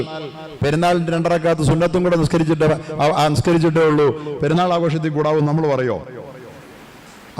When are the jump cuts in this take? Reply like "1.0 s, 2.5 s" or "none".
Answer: none